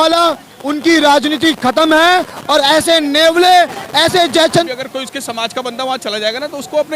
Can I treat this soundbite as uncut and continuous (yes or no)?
no